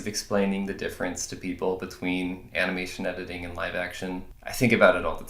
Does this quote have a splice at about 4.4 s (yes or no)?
yes